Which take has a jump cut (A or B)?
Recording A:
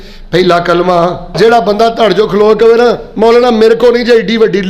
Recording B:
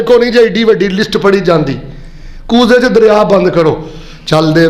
A